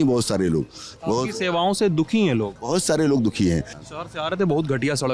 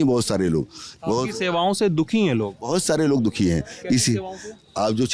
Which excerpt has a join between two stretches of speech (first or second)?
first